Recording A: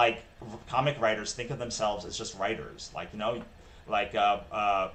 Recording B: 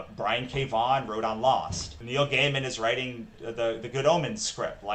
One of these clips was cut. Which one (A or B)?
B